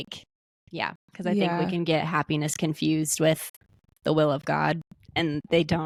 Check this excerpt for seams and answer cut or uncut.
uncut